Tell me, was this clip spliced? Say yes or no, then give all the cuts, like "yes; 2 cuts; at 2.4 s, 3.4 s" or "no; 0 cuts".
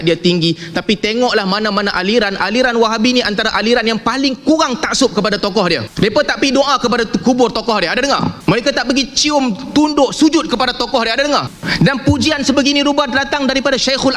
yes; 3 cuts; at 5.9 s, 8.4 s, 11.6 s